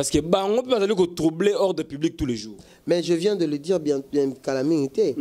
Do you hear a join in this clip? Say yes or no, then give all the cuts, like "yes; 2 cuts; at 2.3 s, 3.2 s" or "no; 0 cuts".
no; 0 cuts